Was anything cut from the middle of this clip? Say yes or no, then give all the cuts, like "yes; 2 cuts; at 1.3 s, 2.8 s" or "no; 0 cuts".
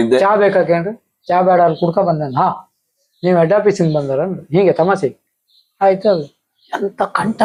no; 0 cuts